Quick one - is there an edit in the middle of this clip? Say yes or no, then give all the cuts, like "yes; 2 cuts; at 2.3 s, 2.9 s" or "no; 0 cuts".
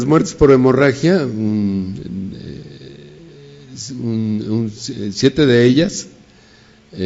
yes; 1 cut; at 4.7 s